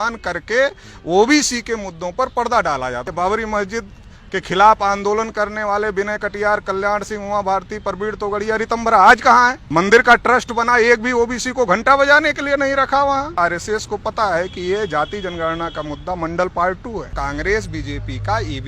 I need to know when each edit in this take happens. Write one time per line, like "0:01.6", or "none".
0:03.1
0:09.6
0:13.4
0:17.1